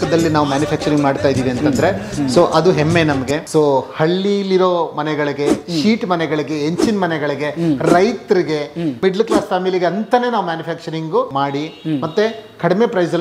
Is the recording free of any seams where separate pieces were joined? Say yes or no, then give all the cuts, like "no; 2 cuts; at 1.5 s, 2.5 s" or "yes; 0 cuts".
no; 1 cut; at 3.4 s